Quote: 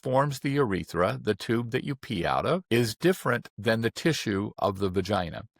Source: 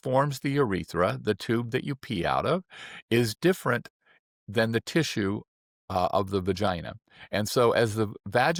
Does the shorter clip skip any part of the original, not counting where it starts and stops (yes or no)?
yes